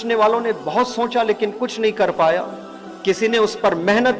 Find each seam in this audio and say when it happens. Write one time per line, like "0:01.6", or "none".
none